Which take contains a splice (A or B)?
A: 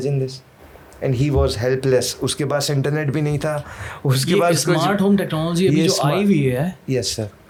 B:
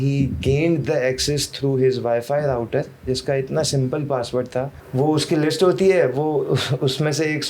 B